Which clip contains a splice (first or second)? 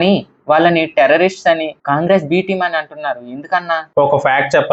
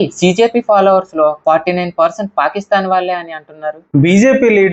second